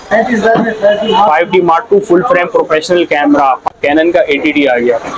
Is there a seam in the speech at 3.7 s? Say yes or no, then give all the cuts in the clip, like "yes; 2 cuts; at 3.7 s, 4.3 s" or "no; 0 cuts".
yes; 1 cut; at 3.7 s